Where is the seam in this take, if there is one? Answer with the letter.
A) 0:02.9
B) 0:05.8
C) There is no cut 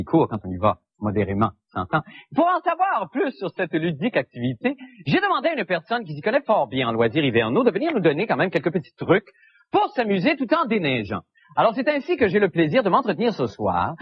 A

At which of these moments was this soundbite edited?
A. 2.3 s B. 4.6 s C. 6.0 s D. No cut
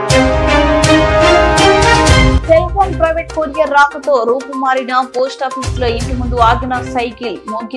A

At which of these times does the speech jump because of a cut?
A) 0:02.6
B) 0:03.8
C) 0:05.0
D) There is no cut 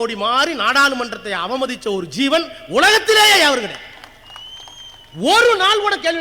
D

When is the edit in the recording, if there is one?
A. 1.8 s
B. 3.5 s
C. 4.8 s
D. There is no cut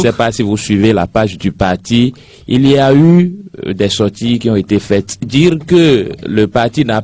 D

